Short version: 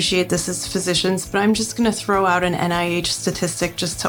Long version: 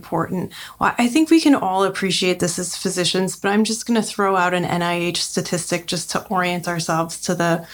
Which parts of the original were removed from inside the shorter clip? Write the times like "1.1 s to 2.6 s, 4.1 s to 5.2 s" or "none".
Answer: none